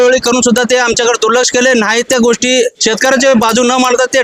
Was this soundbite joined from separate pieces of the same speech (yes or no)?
no